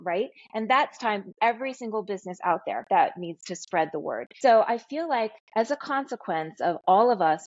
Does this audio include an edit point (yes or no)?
yes